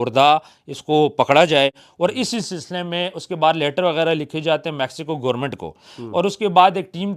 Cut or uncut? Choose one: uncut